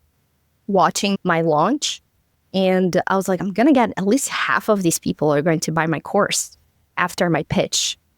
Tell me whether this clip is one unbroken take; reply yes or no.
no